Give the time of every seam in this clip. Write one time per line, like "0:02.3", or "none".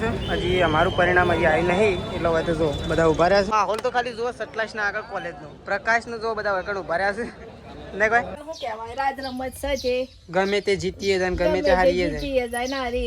0:03.5
0:08.4